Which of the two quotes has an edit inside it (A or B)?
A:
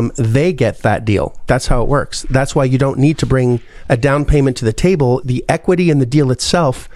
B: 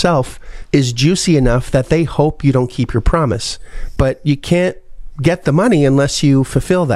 A